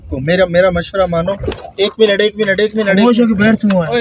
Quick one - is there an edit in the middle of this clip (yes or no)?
no